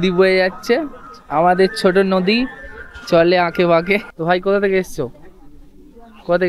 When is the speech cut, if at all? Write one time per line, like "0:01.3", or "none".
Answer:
0:04.1